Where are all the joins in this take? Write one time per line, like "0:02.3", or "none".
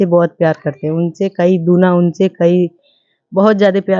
none